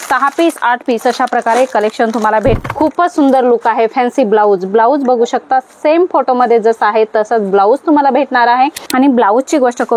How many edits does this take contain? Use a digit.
2